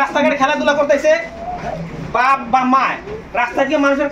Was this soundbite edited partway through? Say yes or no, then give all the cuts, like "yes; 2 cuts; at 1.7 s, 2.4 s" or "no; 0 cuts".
no; 0 cuts